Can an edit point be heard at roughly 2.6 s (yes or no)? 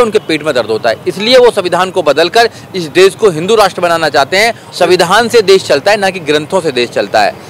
no